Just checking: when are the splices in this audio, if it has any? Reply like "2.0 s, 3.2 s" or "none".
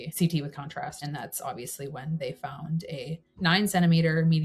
1.0 s